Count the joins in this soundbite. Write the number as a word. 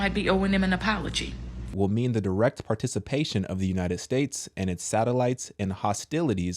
one